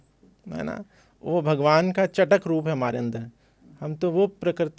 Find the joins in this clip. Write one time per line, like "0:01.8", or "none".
none